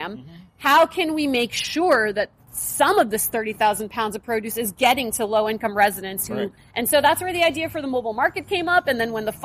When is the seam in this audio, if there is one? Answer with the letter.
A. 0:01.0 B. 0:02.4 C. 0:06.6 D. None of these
C